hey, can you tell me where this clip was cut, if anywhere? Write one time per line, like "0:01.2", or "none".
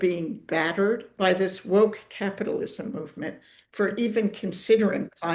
none